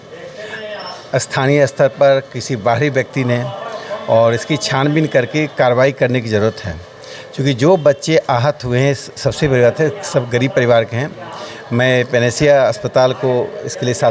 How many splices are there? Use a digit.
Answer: 0